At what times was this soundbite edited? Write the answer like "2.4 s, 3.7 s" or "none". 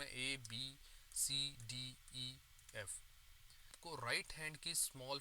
3.8 s